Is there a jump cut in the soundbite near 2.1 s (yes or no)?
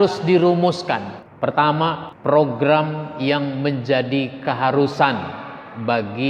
yes